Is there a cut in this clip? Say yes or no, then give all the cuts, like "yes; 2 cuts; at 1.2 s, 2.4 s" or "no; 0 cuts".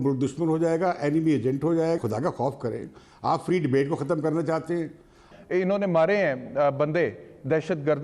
yes; 2 cuts; at 2.0 s, 5.3 s